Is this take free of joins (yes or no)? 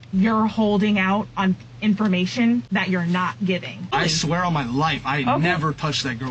no